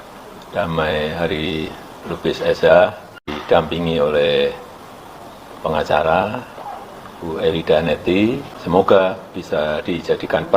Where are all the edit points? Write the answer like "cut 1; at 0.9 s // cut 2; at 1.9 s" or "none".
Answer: cut 1; at 3.3 s // cut 2; at 8.5 s